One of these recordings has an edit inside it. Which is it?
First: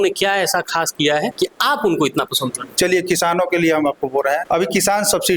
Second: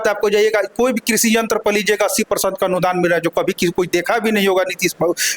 first; 2 cuts; at 1.3 s, 4.4 s

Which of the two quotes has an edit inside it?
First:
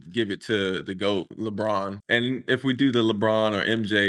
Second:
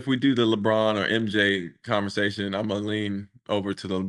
first; 1 cut; at 1.6 s

